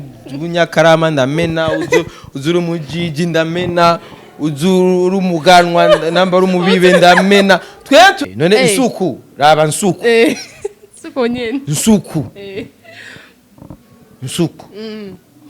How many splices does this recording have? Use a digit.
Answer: 1